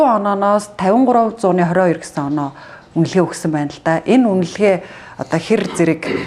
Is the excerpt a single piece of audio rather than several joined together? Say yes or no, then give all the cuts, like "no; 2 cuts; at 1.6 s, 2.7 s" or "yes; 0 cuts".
yes; 0 cuts